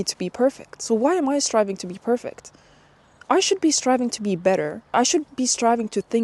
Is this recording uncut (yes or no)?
no